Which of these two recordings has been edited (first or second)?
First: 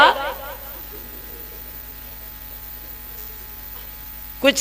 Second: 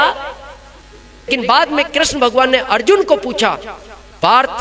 second